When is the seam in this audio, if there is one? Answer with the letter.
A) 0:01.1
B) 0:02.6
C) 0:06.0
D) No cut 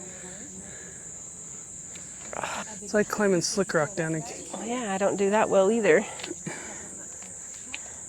B